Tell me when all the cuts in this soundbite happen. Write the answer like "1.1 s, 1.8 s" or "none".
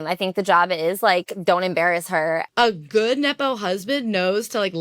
2.5 s

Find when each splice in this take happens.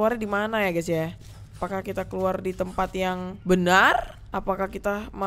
1.6 s, 3.3 s, 4.2 s

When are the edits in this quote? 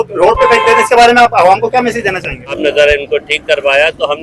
2.6 s

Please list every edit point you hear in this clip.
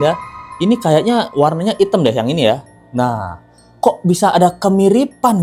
none

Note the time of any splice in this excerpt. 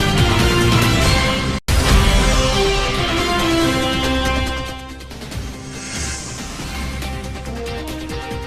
1.6 s

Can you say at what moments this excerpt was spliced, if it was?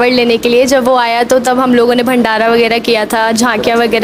none

